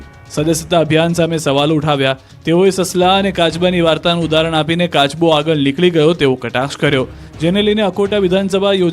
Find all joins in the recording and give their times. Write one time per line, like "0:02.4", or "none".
0:05.1